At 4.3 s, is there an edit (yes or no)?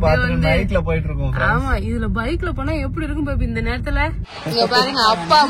yes